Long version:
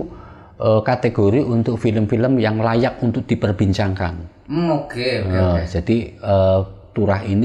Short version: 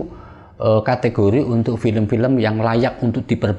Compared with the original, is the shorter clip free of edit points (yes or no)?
yes